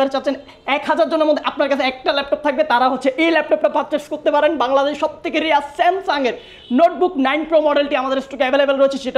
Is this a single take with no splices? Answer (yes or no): yes